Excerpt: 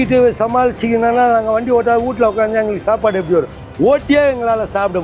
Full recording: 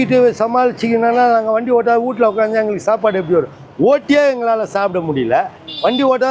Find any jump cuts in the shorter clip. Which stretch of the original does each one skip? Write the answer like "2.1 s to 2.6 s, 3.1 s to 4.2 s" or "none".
none